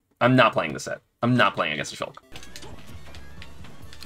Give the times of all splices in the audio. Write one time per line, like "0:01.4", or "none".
0:02.3